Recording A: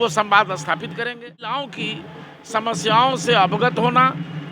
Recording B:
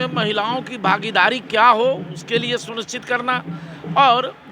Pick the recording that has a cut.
A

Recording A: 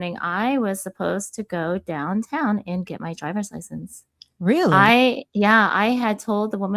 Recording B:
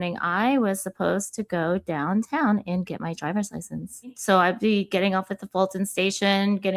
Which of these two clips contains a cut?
B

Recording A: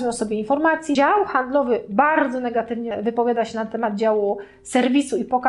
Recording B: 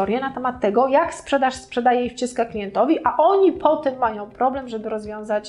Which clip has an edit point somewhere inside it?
A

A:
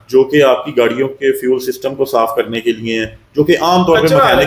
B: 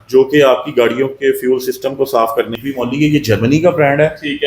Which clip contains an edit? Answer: B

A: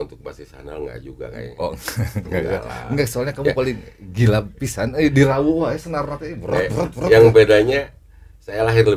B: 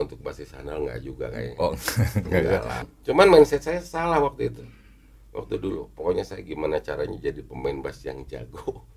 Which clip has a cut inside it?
B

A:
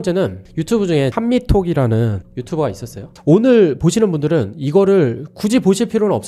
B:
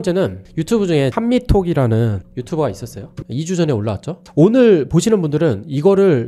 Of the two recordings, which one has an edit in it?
A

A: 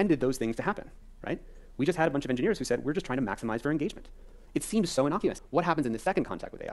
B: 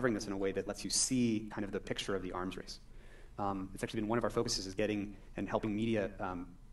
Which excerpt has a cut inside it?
A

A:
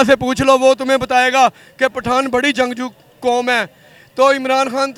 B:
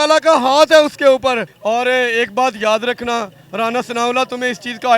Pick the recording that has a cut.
B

